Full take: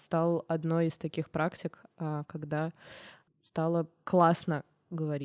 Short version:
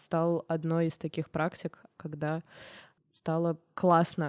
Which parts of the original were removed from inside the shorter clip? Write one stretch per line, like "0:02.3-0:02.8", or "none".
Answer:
0:02.0-0:02.3